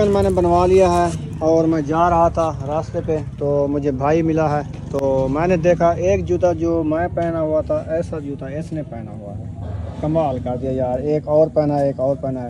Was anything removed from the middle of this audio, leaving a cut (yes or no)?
no